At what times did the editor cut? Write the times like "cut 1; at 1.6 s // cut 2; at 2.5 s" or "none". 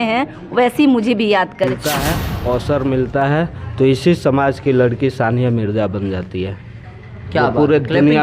cut 1; at 2.0 s